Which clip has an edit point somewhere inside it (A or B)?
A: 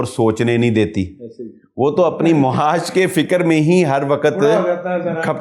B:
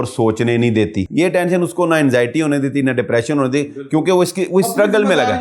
B